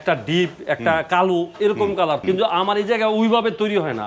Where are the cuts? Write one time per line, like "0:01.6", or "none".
0:02.2